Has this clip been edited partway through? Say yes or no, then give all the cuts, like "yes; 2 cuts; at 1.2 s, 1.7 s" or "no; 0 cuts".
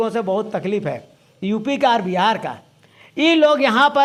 no; 0 cuts